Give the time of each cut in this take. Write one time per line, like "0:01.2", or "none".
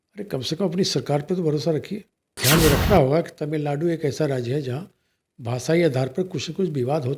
0:02.4